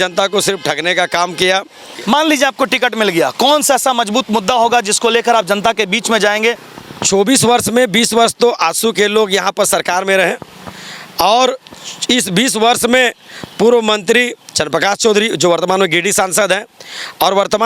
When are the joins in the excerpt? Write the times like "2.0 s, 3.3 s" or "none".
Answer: 1.9 s, 6.6 s